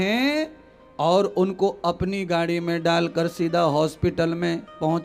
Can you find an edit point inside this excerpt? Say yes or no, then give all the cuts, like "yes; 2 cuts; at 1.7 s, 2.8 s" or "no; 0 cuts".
no; 0 cuts